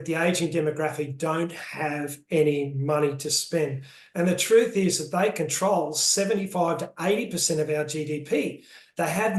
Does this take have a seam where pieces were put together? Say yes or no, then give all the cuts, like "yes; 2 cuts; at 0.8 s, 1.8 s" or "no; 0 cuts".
no; 0 cuts